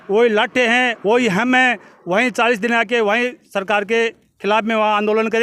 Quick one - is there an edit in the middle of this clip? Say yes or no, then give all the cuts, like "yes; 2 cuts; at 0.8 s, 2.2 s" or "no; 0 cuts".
no; 0 cuts